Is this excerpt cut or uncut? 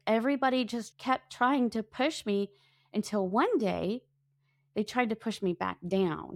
cut